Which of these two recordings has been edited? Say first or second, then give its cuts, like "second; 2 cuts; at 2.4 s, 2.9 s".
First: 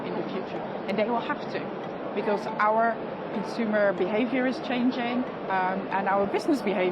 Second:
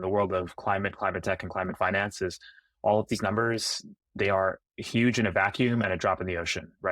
first; 1 cut; at 1.9 s